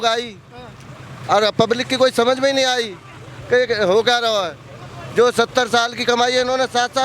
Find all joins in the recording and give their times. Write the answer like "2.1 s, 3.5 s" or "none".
none